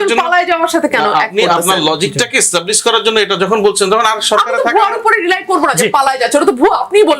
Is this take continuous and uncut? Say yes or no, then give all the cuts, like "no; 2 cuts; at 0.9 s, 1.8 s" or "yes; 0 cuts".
yes; 0 cuts